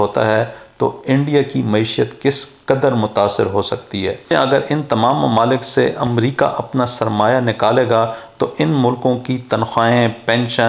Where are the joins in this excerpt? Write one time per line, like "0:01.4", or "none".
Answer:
0:04.3